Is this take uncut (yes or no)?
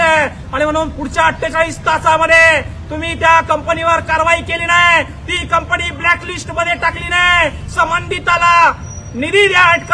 yes